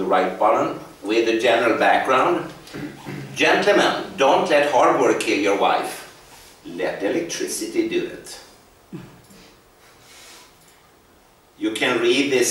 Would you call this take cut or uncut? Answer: uncut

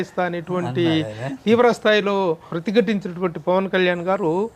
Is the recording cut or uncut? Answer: cut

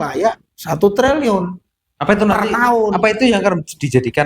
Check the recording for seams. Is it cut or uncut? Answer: uncut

